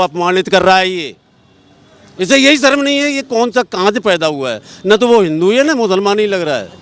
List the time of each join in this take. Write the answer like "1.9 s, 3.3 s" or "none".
none